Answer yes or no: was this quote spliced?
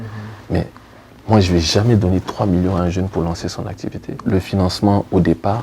yes